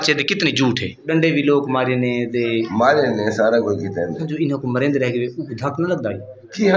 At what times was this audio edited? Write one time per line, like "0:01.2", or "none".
0:01.0
0:04.2